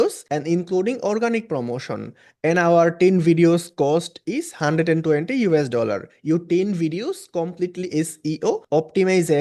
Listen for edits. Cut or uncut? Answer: uncut